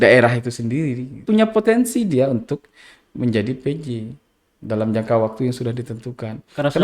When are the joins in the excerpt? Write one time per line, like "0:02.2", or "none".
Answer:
0:01.2